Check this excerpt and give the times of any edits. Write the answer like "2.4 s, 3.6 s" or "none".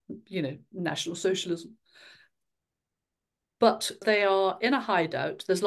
none